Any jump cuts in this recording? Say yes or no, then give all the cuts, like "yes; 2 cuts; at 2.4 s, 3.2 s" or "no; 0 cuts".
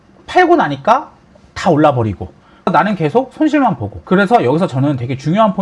yes; 2 cuts; at 2.7 s, 3.9 s